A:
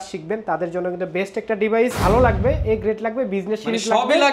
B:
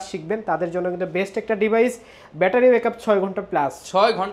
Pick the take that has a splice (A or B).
A